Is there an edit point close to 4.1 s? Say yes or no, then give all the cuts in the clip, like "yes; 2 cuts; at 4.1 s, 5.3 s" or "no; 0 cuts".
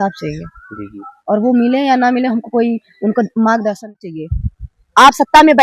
yes; 1 cut; at 4.1 s